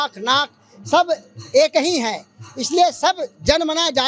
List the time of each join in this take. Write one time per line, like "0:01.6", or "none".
none